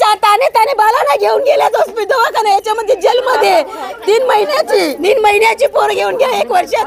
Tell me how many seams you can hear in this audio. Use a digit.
1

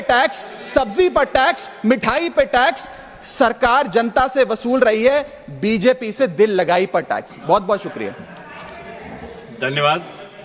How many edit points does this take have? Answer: 0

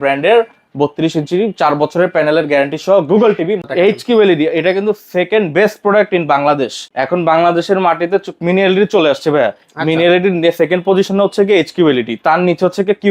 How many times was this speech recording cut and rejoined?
2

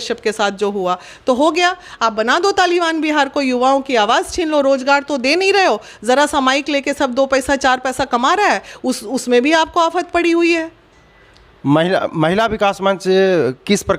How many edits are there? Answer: 0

